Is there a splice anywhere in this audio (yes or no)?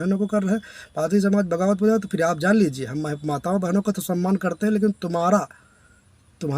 no